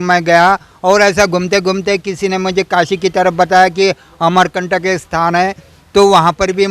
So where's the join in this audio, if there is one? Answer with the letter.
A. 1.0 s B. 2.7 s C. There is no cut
C